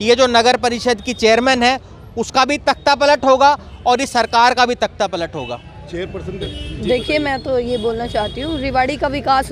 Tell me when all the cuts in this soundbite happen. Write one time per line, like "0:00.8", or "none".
none